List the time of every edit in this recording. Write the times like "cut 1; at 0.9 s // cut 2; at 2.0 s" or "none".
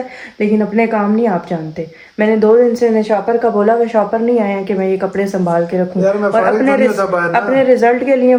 none